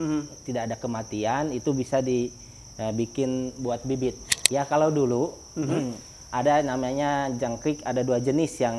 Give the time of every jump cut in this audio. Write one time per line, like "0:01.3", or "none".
0:04.3